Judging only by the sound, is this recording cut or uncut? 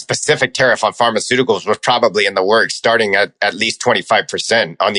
uncut